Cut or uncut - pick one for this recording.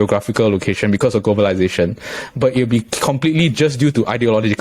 uncut